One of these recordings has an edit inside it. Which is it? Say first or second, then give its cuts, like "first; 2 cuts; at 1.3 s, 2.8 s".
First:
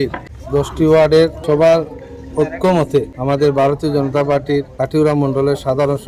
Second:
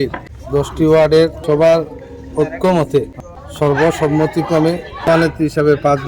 second; 1 cut; at 3.1 s